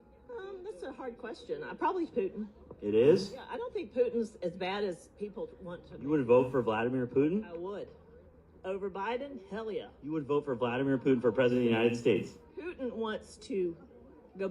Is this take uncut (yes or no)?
no